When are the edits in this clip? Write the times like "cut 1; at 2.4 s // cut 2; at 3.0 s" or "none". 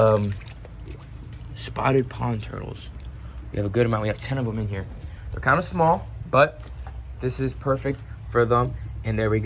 none